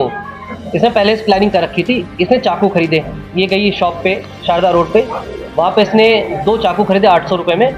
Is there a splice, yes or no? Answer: no